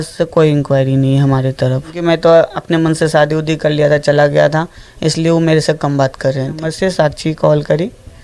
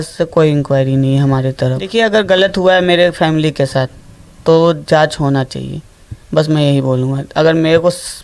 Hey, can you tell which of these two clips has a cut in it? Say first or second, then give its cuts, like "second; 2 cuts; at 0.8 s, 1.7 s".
first; 2 cuts; at 1.9 s, 6.7 s